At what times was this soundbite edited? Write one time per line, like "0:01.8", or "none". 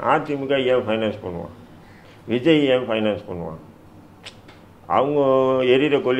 none